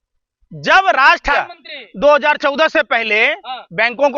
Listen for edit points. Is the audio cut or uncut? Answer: cut